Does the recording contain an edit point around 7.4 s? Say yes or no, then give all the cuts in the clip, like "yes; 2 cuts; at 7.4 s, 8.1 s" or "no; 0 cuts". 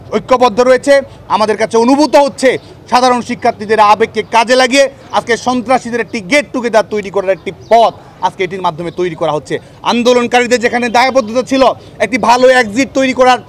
no; 1 cut; at 1.2 s